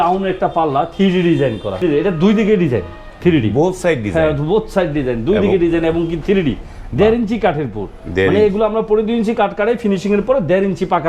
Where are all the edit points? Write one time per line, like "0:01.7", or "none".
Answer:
0:01.8